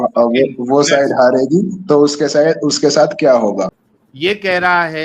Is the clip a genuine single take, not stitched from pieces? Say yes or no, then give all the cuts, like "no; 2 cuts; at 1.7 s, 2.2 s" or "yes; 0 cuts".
no; 1 cut; at 3.8 s